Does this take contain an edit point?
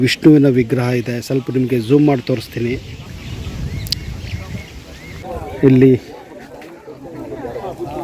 yes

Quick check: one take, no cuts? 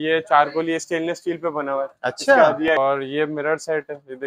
no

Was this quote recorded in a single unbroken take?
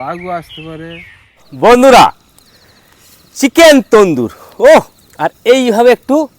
no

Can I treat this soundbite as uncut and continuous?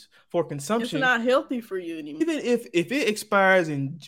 no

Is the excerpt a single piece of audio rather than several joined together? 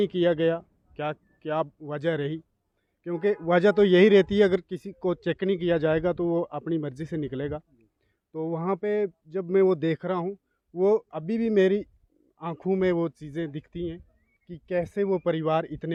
yes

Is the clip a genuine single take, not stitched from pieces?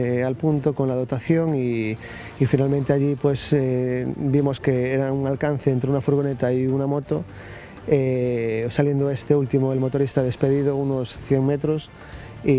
yes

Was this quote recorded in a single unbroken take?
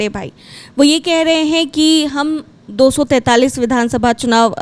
yes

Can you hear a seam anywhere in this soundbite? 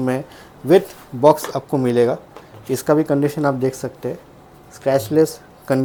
no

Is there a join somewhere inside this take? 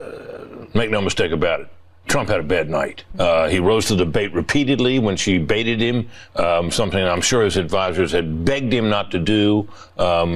yes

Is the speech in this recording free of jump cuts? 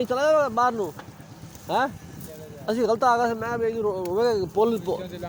yes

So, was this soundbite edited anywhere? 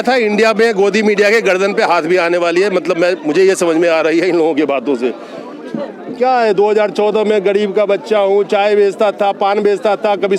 no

